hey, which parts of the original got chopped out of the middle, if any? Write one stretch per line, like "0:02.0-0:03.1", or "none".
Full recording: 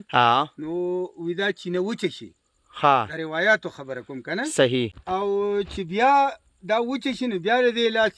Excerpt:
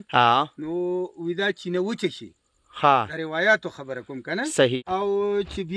0:04.8-0:05.0